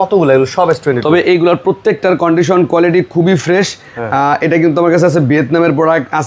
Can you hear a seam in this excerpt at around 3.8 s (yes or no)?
no